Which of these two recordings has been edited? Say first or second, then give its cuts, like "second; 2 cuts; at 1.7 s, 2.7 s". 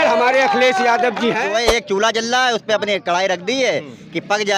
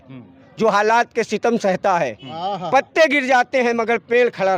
first; 1 cut; at 1.5 s